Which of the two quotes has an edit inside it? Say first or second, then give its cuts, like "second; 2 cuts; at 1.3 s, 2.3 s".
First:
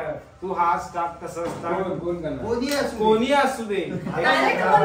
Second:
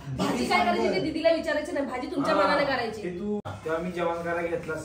second; 1 cut; at 3.5 s